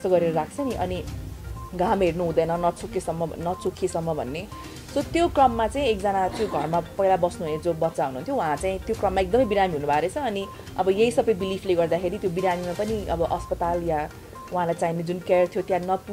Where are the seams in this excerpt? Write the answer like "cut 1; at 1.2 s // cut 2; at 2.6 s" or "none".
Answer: none